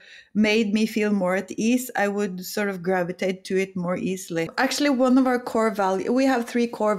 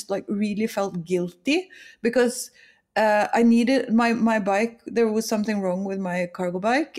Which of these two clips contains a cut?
first; 1 cut; at 4.5 s

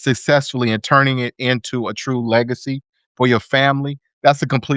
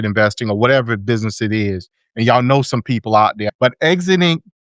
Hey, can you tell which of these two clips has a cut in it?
second; 1 cut; at 3.5 s

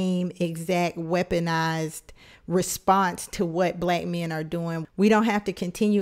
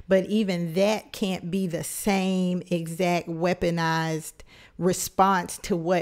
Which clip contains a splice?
first; 1 cut; at 4.8 s

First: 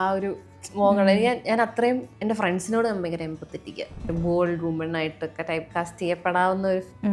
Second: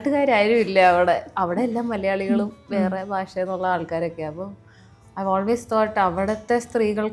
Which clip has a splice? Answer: first; 2 cuts; at 2.1 s, 4.0 s

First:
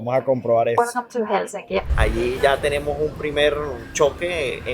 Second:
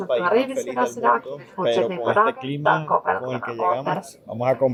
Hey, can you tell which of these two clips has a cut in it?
first; 1 cut; at 1.9 s

